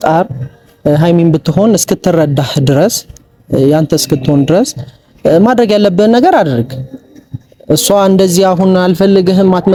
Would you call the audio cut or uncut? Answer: uncut